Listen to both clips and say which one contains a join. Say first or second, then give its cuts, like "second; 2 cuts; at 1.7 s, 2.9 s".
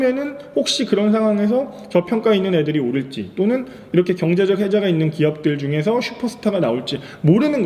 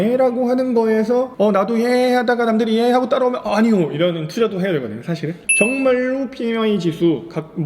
second; 2 cuts; at 1.3 s, 5.1 s